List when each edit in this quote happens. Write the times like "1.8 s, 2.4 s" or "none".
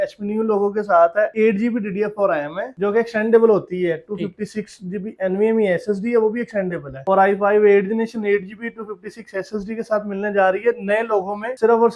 none